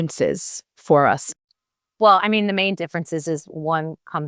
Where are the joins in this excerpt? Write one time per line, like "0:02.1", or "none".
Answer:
0:01.2